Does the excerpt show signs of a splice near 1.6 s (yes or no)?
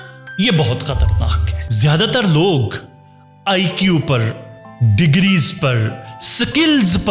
yes